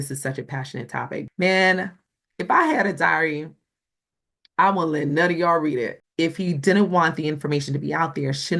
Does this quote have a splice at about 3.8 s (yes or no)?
no